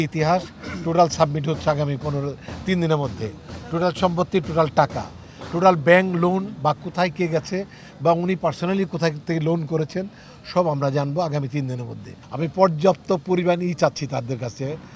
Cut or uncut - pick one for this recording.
uncut